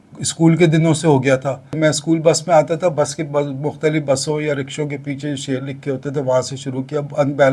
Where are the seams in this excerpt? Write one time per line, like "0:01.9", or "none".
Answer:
0:01.8